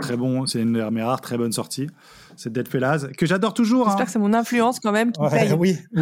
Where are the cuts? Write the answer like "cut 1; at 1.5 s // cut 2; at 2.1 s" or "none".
none